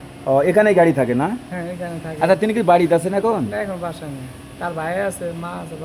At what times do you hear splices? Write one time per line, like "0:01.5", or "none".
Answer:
none